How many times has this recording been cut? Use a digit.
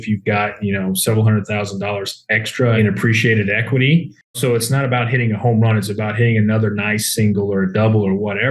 2